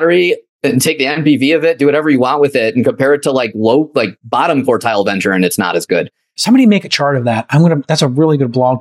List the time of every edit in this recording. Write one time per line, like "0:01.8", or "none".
0:06.3